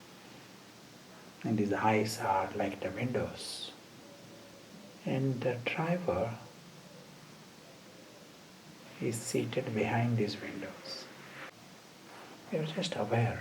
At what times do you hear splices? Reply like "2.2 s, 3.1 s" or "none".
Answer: 4.7 s, 8.5 s, 11.5 s